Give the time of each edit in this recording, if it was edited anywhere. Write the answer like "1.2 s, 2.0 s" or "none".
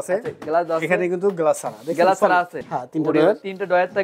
2.6 s

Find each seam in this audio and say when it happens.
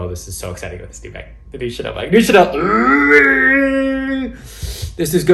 none

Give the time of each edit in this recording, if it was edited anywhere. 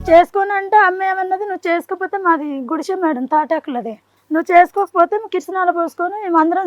none

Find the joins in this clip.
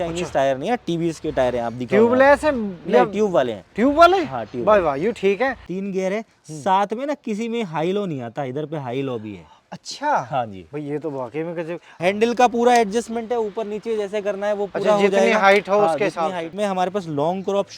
5.7 s, 11.9 s, 16.5 s

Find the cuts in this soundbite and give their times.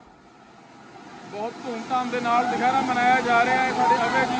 none

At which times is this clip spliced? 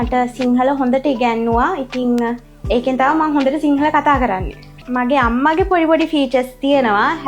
4.8 s

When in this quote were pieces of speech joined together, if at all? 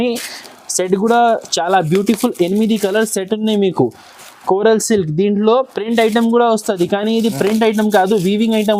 none

